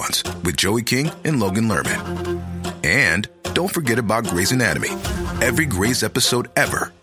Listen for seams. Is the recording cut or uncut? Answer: uncut